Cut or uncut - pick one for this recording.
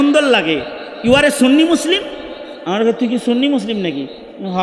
uncut